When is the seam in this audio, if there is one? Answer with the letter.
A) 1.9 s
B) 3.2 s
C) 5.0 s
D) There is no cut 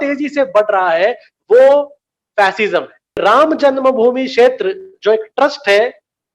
B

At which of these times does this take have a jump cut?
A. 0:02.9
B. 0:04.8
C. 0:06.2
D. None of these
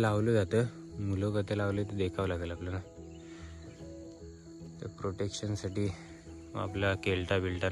D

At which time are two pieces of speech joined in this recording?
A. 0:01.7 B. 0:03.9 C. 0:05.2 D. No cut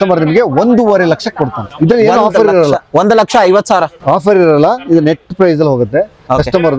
D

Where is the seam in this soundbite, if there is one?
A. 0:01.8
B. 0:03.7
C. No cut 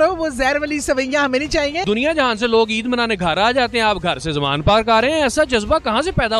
A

